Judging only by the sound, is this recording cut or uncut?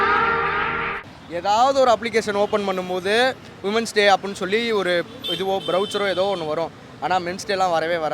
cut